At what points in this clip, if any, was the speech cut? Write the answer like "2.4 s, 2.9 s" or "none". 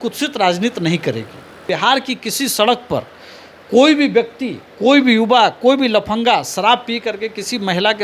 1.6 s